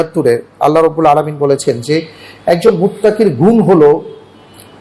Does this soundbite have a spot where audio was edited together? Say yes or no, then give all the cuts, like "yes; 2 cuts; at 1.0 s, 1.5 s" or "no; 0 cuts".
no; 0 cuts